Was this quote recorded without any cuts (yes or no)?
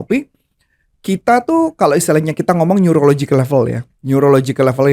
yes